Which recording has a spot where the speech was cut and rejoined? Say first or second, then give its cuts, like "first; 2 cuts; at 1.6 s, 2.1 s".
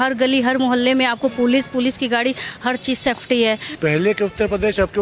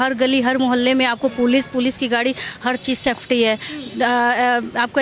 first; 1 cut; at 3.7 s